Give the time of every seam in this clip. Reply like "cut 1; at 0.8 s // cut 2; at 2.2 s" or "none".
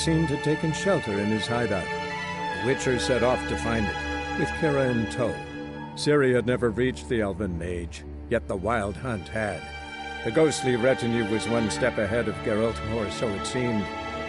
none